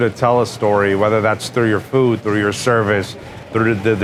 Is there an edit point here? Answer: no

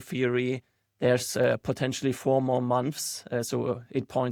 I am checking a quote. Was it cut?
no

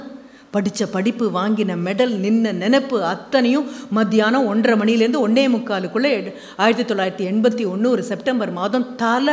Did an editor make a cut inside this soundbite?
no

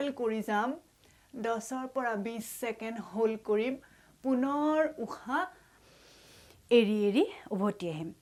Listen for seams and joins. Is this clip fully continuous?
yes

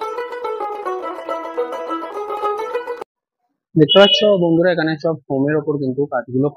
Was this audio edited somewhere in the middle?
yes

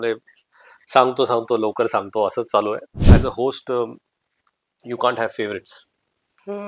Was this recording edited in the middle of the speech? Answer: yes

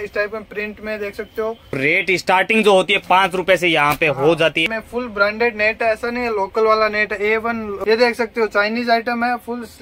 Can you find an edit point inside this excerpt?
yes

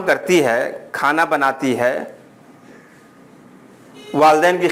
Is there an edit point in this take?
no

